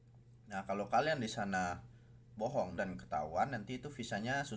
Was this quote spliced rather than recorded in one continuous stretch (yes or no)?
yes